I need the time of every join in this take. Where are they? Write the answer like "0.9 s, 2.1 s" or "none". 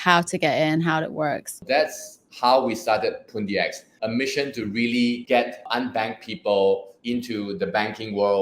1.7 s, 3.8 s, 5.6 s, 6.9 s

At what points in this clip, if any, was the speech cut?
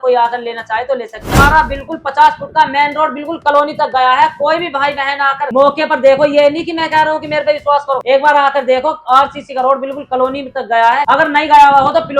1.4 s

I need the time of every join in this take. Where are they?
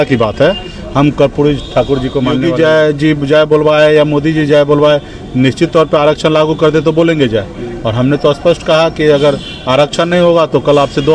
2.4 s

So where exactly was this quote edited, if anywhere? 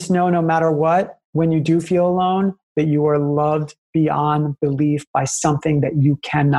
1.2 s

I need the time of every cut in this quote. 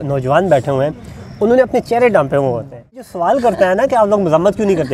3.1 s

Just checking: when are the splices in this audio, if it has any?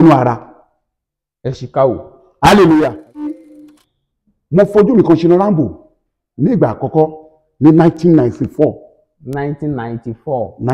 3.3 s

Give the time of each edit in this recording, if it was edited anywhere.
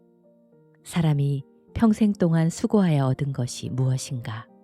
0.9 s

